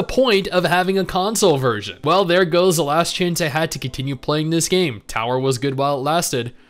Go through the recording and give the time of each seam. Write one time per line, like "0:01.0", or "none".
0:01.9

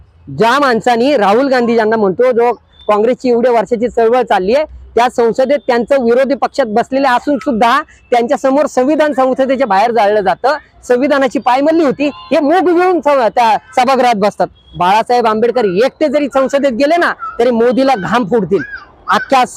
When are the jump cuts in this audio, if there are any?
0:14.6

